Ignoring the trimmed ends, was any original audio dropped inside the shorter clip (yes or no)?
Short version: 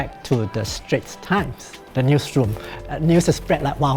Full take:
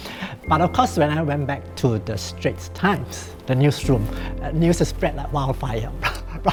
no